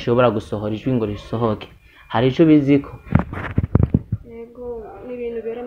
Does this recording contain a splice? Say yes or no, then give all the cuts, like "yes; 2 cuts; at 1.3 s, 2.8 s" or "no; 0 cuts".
no; 0 cuts